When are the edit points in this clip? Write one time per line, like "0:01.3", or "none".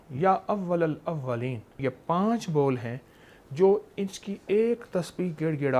0:01.7